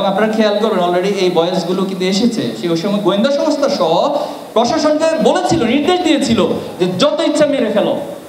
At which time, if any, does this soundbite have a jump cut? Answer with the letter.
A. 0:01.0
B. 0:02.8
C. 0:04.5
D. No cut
D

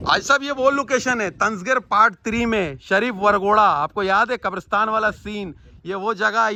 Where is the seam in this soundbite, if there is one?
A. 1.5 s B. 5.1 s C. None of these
C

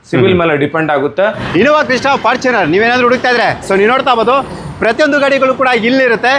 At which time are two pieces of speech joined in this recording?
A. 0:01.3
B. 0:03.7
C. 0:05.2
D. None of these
A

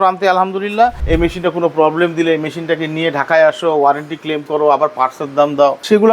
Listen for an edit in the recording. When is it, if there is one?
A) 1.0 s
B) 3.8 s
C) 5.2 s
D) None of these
A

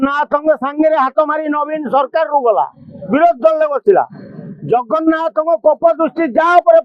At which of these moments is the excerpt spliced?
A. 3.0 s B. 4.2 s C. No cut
C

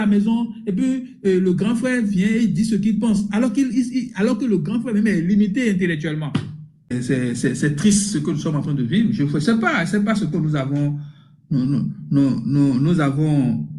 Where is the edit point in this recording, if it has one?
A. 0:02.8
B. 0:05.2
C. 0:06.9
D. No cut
C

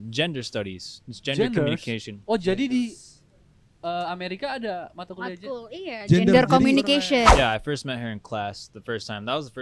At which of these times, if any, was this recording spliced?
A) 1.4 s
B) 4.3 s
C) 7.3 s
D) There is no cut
C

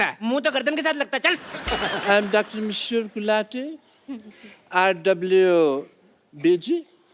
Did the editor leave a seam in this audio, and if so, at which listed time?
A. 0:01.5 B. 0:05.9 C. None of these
A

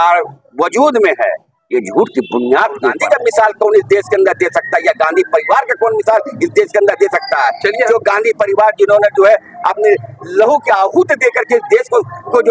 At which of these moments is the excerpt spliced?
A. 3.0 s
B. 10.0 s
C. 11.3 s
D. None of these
A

